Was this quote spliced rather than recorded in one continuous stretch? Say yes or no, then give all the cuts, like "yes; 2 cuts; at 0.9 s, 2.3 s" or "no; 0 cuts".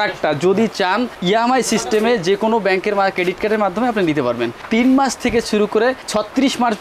yes; 1 cut; at 4.6 s